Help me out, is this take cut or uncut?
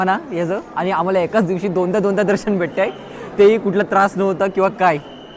uncut